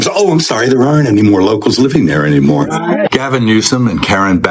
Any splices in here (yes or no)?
yes